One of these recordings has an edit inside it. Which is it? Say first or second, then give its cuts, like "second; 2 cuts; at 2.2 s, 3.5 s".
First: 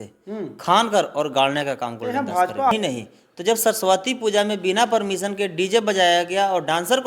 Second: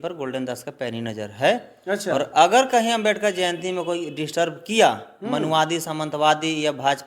first; 1 cut; at 2.7 s